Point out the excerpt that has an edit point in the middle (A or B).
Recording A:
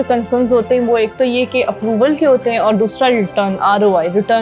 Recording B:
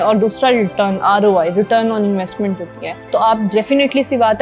B